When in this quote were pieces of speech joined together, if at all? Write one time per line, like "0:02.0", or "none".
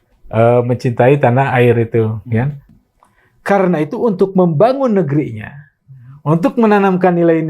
0:02.6